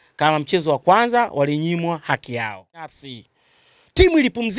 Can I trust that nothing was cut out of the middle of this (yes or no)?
no